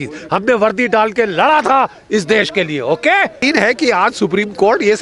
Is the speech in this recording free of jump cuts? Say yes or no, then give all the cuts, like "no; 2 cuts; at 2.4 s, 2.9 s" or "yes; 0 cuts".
no; 1 cut; at 3.4 s